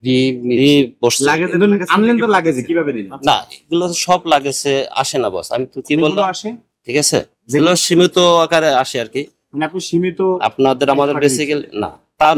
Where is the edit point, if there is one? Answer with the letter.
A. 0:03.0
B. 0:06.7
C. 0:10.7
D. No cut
D